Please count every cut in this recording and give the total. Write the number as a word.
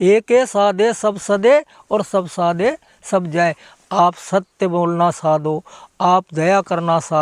zero